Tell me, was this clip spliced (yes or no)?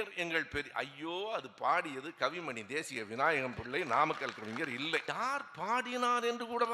yes